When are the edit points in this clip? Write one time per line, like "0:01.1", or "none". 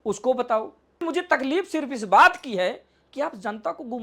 0:01.0